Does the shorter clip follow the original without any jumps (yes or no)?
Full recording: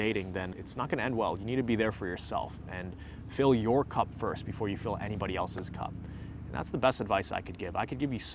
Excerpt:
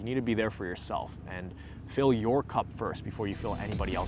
yes